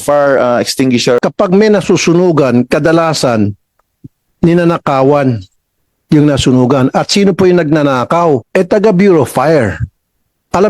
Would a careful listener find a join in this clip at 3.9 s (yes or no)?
no